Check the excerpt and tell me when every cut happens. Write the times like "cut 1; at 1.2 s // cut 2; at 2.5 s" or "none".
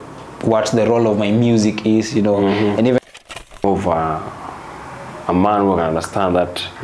cut 1; at 3.0 s